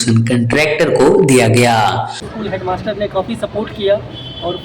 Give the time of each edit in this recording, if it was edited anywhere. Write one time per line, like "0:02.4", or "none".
0:02.3

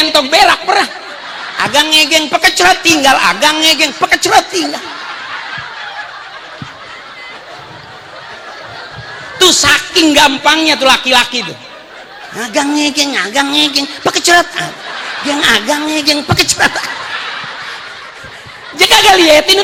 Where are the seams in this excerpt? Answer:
none

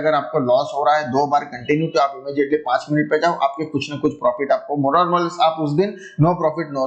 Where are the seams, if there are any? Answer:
none

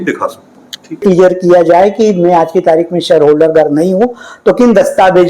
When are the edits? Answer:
0:01.0

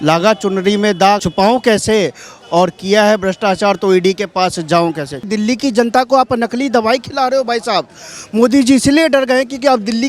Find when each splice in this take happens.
0:01.2
0:05.2

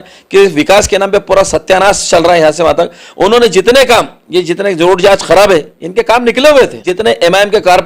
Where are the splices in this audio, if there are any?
0:06.9

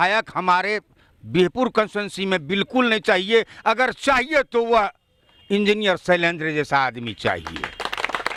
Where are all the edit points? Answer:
none

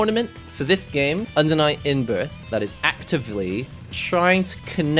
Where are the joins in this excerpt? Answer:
0:01.3
0:02.4

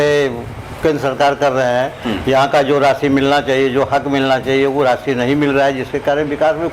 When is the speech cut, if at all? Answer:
none

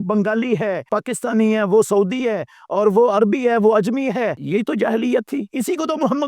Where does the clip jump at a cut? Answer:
0:00.9
0:04.4
0:05.5

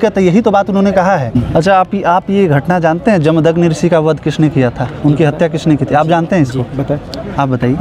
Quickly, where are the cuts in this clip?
0:01.3

